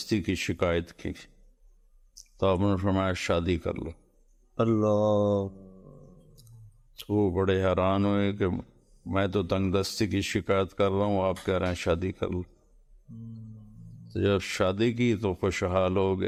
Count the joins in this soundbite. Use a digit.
0